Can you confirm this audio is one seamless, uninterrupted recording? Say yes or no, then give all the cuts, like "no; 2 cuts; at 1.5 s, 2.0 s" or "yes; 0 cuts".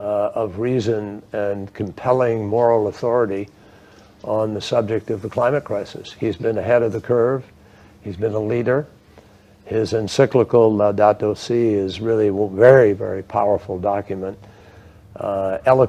yes; 0 cuts